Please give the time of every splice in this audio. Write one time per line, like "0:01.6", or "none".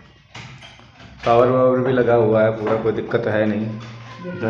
none